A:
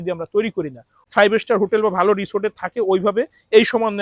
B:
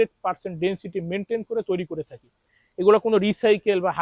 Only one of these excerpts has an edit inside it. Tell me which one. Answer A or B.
A